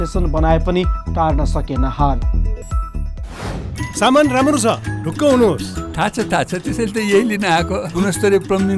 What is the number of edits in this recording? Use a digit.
1